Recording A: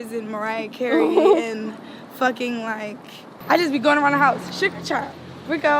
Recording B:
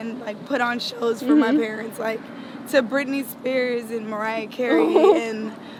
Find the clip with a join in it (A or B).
A